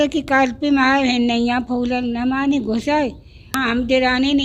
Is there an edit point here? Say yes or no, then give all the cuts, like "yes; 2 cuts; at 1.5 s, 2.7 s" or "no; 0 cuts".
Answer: yes; 1 cut; at 3.4 s